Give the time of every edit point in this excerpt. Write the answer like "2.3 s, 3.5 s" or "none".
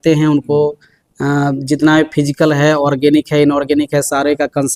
none